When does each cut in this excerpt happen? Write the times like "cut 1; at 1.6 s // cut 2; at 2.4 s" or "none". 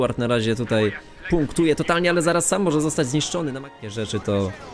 cut 1; at 3.7 s